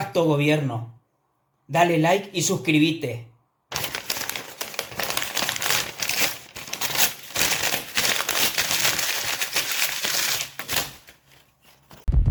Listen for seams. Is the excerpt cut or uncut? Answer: uncut